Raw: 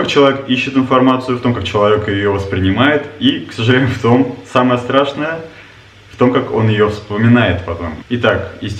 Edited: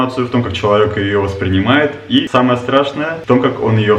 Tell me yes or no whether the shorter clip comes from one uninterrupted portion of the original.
no